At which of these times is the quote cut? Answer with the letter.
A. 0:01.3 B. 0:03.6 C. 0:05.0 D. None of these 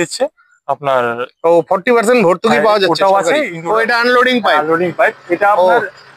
B